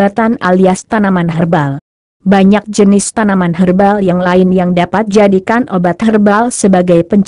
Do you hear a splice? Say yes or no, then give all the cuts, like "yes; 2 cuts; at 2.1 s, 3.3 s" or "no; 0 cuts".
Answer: yes; 1 cut; at 5.2 s